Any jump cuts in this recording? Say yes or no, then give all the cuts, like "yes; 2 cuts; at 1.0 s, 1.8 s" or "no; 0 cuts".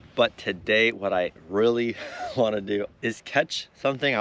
yes; 1 cut; at 2.9 s